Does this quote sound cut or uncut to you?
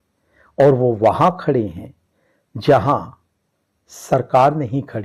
uncut